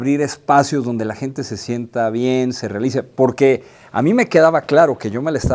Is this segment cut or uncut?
uncut